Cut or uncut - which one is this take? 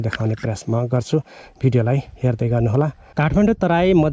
cut